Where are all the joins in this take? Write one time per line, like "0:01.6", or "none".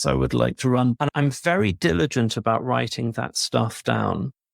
0:01.0